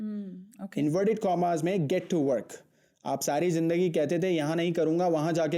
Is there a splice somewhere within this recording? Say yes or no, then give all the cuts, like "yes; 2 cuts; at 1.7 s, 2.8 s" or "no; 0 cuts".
no; 0 cuts